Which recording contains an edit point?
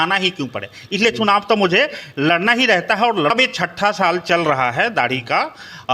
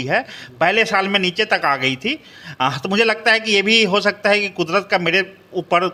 first; 1 cut; at 3.3 s

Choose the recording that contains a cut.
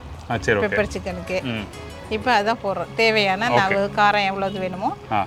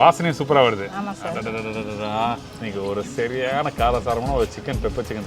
second; 1 cut; at 2.5 s

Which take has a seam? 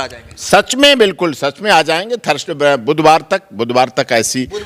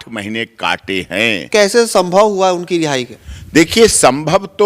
second; 1 cut; at 1.4 s

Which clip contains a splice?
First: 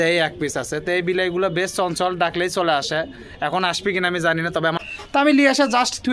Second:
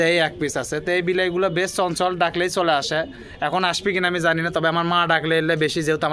first; 1 cut; at 4.8 s

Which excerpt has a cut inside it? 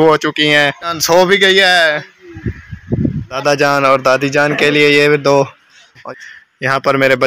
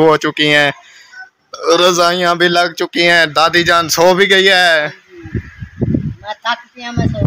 first; 3 cuts; at 1.0 s, 2.8 s, 6.0 s

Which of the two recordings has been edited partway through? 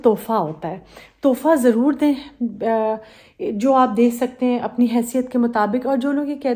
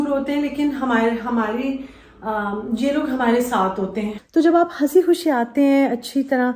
second; 1 cut; at 4.1 s

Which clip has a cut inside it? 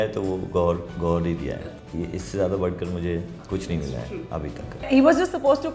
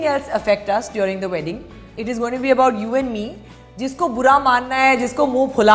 first; 3 cuts; at 1.6 s, 3.4 s, 4.8 s

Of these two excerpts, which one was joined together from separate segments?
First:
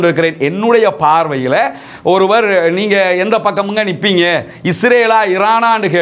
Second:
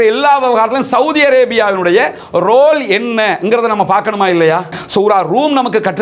second; 1 cut; at 4.8 s

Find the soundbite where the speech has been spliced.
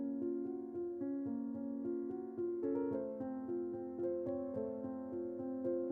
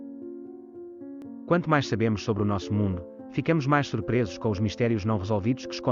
second; 1 cut; at 1.2 s

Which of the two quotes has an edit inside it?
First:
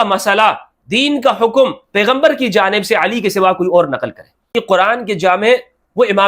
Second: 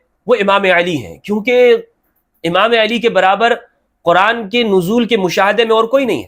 first; 1 cut; at 4.5 s

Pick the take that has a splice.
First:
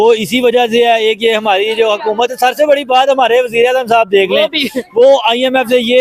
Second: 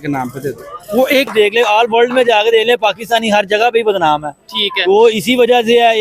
second; 1 cut; at 1.3 s

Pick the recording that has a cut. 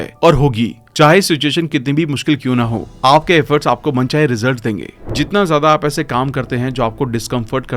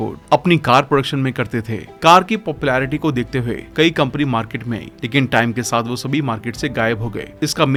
first; 1 cut; at 5.0 s

